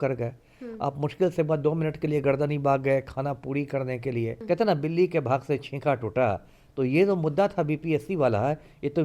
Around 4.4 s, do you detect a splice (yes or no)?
yes